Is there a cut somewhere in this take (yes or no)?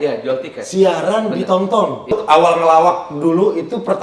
yes